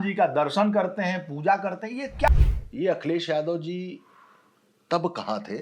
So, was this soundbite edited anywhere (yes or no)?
yes